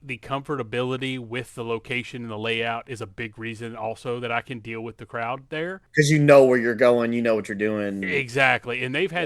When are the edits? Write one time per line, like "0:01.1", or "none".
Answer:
0:05.8